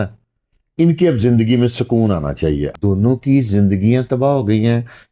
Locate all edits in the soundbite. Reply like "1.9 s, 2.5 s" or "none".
2.7 s